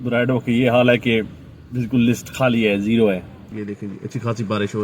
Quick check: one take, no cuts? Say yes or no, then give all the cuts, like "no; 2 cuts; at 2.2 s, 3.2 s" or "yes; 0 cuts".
no; 1 cut; at 3.4 s